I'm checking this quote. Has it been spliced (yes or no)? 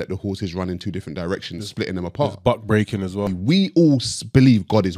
yes